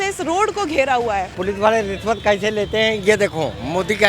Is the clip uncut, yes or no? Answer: no